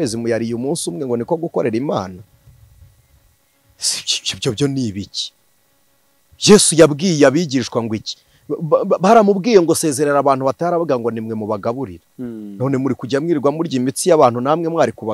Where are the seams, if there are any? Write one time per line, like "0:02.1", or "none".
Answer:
none